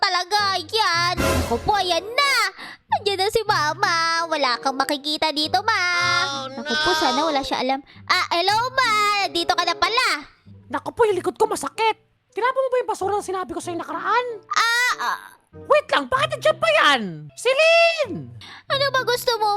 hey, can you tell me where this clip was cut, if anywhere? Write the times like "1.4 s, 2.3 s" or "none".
1.2 s, 6.4 s